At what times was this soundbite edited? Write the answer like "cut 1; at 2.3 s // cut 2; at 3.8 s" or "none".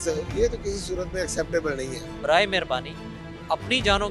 cut 1; at 2.1 s